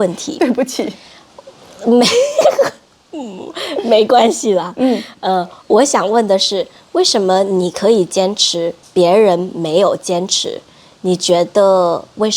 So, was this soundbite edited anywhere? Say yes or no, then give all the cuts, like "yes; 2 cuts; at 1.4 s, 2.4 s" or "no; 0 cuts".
no; 0 cuts